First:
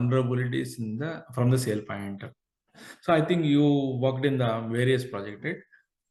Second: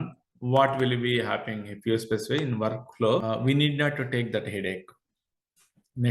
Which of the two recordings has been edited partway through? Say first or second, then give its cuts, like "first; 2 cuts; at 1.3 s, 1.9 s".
second; 1 cut; at 3.2 s